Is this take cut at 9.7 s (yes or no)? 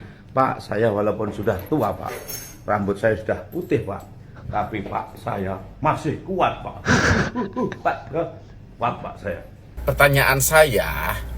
yes